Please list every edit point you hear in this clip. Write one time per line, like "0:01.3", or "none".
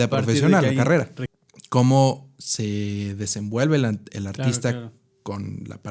0:01.2

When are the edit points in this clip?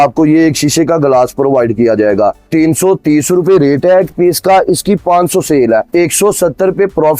none

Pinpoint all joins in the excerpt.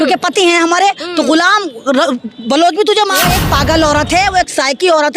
0:03.3

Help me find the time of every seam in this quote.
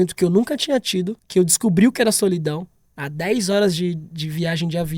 0:01.2

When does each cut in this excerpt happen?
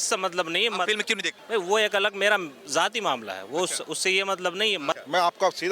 0:01.3
0:05.0

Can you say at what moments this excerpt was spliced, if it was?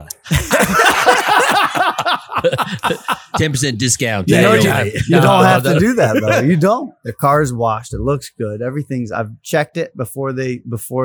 0:07.0

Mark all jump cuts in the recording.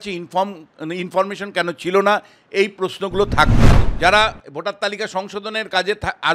0:03.8

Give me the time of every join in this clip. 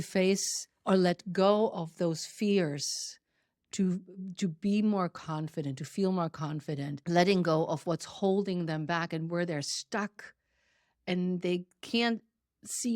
0:07.0

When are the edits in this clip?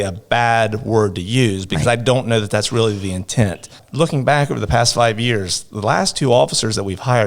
0:03.7

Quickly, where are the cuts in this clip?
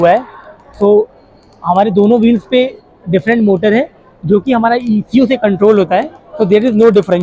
none

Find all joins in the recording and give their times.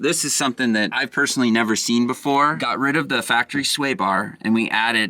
0:01.0
0:02.6

